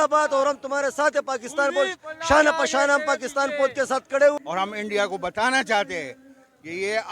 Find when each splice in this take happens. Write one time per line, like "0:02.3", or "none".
0:04.3